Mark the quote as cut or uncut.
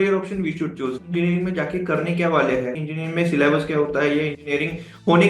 cut